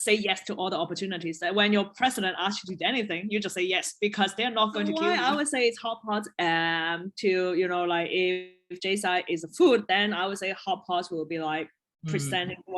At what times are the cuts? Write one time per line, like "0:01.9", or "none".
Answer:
0:05.0